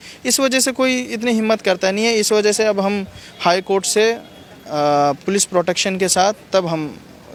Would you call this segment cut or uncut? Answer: uncut